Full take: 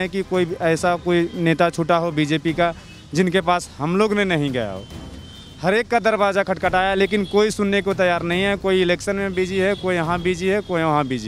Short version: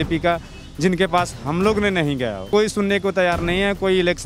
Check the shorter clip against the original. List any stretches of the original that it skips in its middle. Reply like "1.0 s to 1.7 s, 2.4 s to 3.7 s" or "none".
4.8 s to 7.3 s

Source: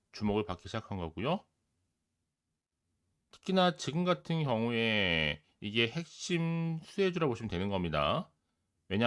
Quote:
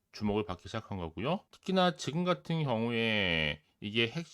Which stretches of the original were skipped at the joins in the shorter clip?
1.5 s to 3.3 s

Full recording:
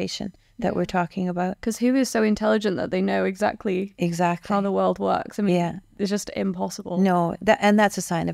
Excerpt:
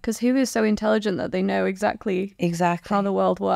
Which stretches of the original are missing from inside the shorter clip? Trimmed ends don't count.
none

